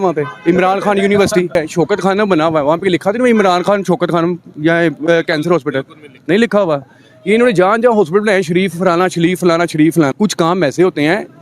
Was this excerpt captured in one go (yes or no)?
no